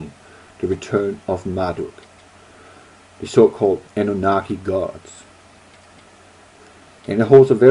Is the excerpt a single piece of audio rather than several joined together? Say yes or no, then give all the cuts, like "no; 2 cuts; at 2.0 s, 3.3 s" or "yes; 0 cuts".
no; 1 cut; at 2.8 s